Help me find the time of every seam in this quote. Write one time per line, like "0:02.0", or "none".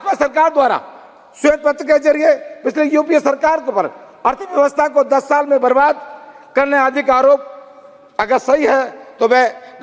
none